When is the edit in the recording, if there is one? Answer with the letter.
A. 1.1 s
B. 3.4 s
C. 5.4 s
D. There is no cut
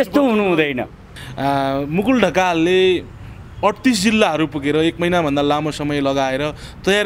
A